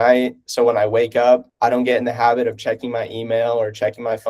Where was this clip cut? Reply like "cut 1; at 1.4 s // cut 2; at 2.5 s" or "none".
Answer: cut 1; at 1.5 s